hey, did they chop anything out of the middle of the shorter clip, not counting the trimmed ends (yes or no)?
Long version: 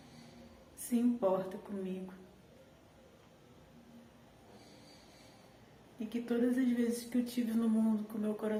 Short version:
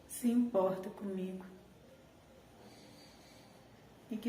yes